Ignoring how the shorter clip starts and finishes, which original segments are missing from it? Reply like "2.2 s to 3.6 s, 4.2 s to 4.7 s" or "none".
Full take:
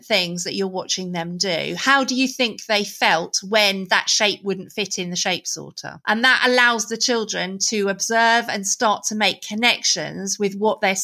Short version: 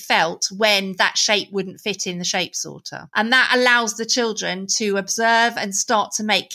none